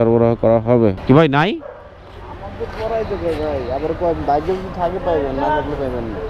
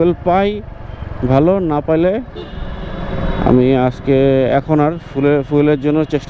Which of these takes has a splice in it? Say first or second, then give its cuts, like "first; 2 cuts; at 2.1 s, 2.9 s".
first; 1 cut; at 1.0 s